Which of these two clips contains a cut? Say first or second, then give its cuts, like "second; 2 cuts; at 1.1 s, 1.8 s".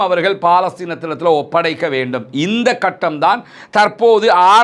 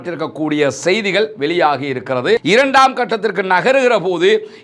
second; 1 cut; at 2.4 s